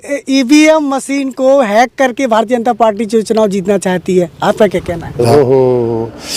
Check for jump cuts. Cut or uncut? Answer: cut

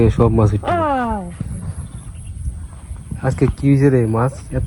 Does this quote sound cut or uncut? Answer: uncut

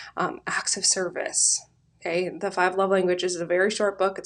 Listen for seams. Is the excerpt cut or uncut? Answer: uncut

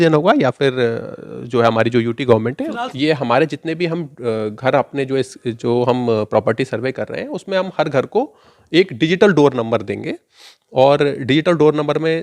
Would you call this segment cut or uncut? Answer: cut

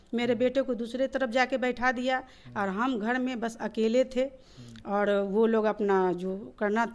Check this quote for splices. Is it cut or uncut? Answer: uncut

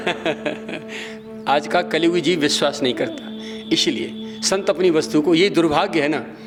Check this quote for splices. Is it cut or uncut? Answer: uncut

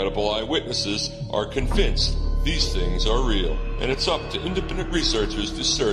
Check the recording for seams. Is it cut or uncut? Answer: cut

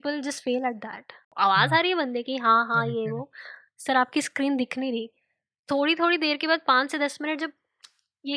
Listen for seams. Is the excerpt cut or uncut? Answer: cut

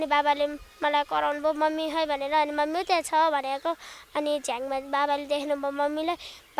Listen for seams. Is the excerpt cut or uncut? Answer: uncut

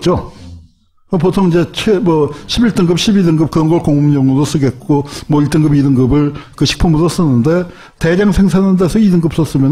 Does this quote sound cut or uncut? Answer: uncut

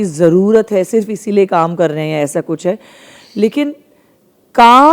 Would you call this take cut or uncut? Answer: uncut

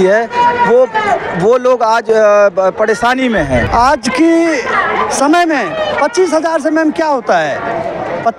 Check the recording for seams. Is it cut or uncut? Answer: cut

